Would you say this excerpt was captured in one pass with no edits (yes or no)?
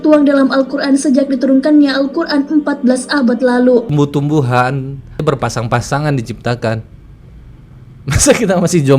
no